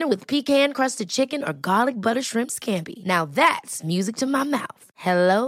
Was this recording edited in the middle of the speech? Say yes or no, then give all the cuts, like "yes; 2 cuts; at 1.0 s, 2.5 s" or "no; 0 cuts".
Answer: no; 0 cuts